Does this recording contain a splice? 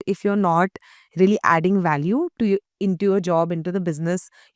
no; 0 cuts

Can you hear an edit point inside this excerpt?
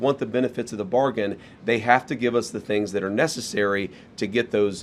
no; 0 cuts

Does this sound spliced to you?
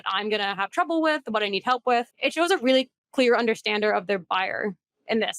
yes; 1 cut; at 2.1 s

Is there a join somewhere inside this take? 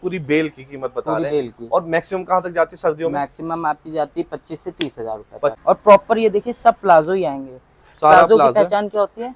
yes; 1 cut; at 5.6 s

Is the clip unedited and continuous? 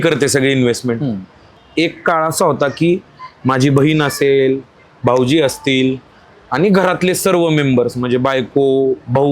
no; 1 cut; at 1.5 s

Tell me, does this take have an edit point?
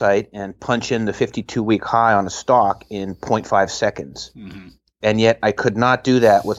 no; 0 cuts

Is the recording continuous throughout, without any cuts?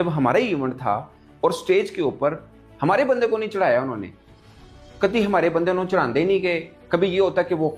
yes; 0 cuts

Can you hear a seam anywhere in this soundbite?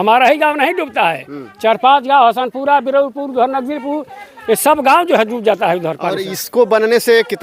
no; 0 cuts

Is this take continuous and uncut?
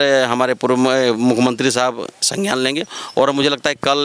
yes; 0 cuts

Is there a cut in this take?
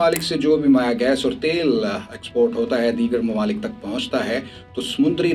no; 0 cuts

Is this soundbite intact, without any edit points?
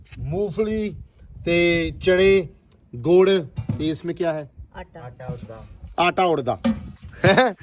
yes; 0 cuts

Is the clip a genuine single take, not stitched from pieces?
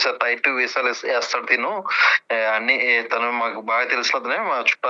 yes; 0 cuts

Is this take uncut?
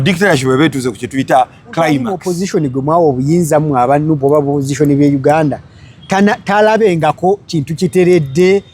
no; 1 cut; at 2.2 s

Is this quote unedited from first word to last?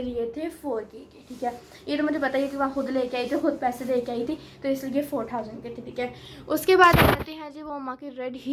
yes; 0 cuts

